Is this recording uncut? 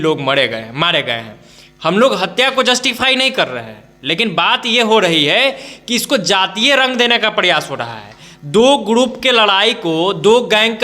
yes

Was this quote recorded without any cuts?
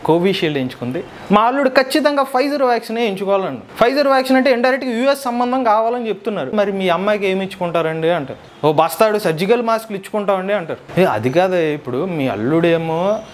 no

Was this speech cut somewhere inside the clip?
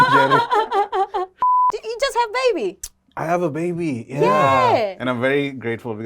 yes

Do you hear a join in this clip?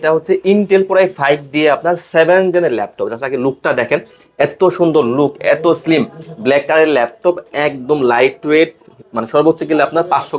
no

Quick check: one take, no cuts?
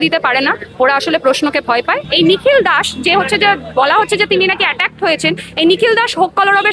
no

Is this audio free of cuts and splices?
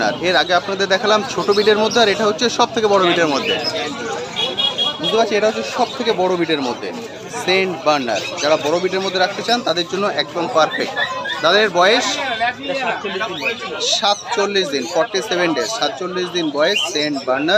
yes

